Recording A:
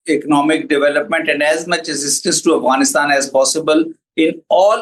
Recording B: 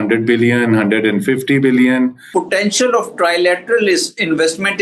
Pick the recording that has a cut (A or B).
B